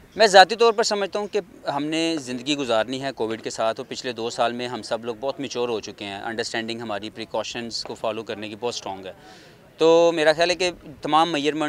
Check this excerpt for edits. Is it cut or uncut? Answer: uncut